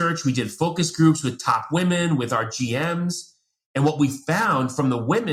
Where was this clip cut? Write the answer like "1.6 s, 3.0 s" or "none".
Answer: none

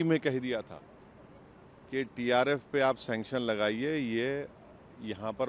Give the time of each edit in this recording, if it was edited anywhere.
none

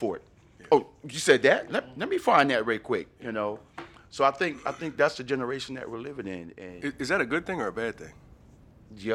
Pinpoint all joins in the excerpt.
none

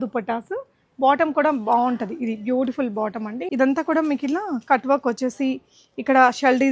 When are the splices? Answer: 3.4 s

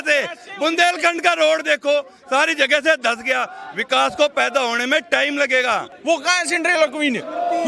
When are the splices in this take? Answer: 5.9 s

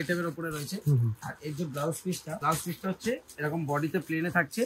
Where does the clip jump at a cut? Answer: 1.2 s, 2.4 s

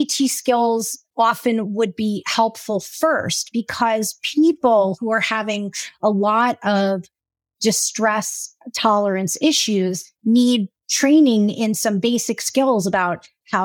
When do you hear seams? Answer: 1.0 s

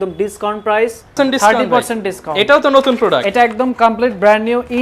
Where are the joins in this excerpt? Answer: 1.1 s

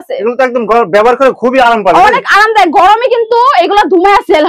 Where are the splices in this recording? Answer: none

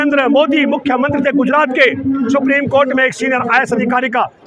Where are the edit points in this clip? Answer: none

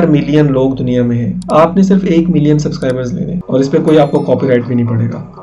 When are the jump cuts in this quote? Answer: 3.4 s

